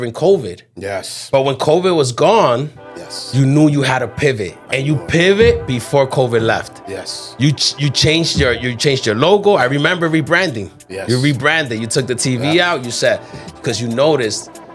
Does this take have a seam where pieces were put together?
no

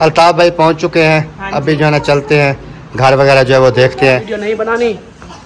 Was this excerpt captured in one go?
no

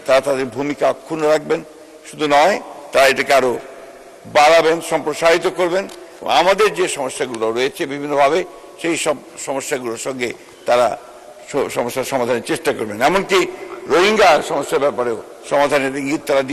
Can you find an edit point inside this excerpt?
no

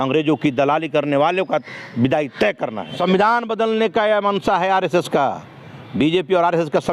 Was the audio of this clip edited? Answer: yes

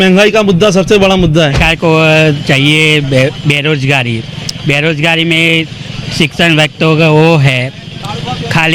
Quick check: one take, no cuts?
no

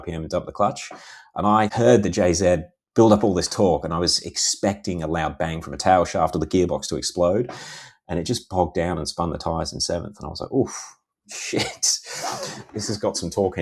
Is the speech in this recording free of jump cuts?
no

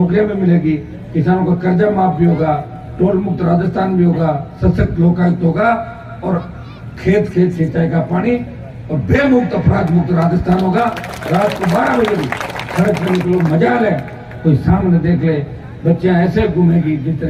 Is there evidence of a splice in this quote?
no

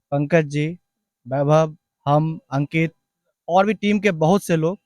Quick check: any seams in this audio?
no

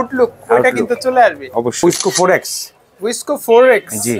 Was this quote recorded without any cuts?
no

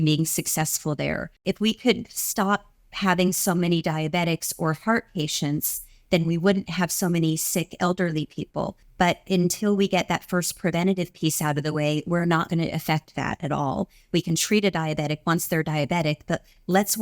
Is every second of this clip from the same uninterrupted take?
no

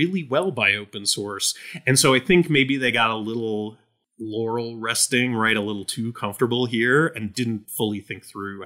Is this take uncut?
no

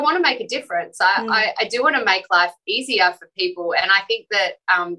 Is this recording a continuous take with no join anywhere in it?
yes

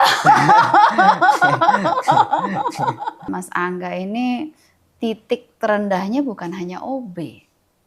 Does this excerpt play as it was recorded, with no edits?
no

